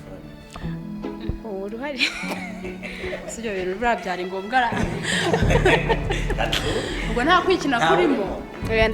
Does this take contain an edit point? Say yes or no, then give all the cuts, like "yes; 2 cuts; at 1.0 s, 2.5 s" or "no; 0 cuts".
no; 0 cuts